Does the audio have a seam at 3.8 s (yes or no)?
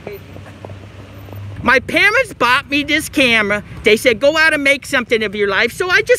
no